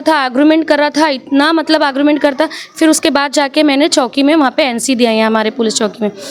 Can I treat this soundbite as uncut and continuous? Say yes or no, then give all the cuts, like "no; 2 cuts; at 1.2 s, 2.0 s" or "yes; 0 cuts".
yes; 0 cuts